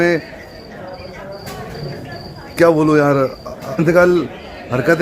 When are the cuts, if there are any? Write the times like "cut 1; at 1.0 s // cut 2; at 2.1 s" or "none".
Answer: cut 1; at 3.8 s